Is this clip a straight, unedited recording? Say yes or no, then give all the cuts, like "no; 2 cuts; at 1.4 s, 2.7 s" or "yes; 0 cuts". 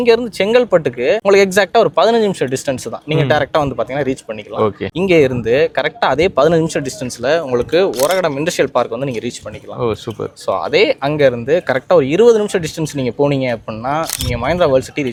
yes; 0 cuts